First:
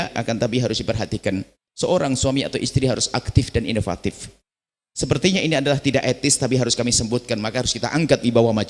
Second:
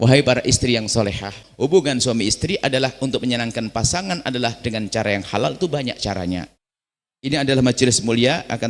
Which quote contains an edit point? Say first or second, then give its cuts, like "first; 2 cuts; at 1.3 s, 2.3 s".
second; 1 cut; at 1.4 s